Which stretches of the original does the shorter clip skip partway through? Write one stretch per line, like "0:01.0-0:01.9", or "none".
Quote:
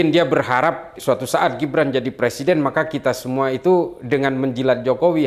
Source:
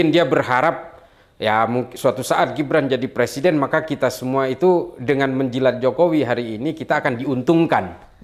0:00.9-0:01.9